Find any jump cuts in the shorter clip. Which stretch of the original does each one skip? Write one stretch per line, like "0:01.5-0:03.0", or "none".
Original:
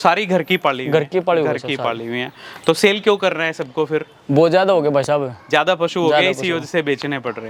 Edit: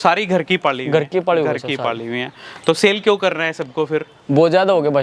none

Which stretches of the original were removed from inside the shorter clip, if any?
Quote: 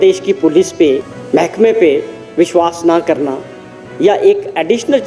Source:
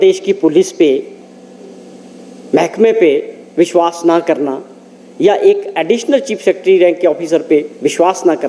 0:01.1-0:02.3

